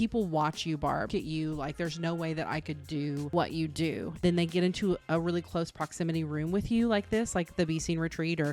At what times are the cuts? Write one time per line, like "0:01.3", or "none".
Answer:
0:01.1
0:03.3
0:04.2